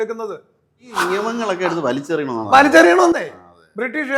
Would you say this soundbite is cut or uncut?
cut